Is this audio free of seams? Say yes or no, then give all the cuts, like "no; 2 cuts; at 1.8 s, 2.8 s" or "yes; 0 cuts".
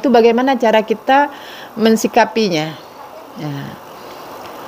yes; 0 cuts